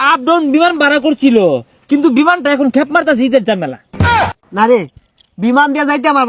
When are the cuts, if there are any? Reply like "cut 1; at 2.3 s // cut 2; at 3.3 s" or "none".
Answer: none